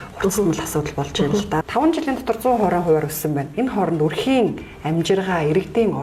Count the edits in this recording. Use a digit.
1